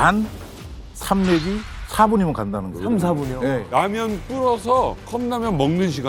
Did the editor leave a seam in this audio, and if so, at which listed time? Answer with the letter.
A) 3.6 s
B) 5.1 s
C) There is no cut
A